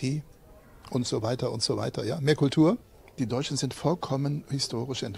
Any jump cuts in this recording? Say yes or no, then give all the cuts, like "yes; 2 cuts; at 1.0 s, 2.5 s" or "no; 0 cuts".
yes; 1 cut; at 2.9 s